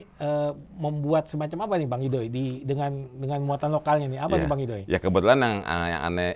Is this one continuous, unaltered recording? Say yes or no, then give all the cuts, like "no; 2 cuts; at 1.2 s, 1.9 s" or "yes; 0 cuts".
yes; 0 cuts